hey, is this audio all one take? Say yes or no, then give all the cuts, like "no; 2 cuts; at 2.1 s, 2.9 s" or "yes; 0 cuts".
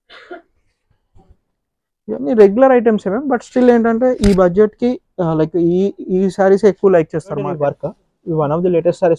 no; 1 cut; at 7.6 s